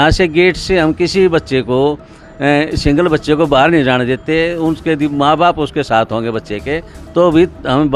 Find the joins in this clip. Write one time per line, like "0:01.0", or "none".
none